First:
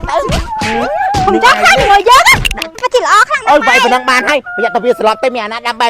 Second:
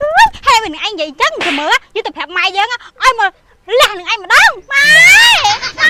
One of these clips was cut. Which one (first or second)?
first